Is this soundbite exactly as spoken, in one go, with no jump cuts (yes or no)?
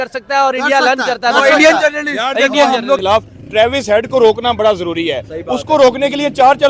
no